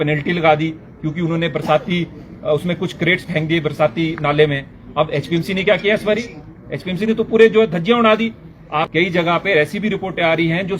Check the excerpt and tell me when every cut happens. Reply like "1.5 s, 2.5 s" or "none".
8.9 s